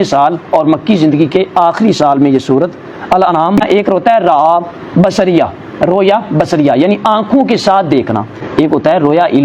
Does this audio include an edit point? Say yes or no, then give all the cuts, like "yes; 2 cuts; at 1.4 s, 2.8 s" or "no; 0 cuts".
yes; 1 cut; at 3.6 s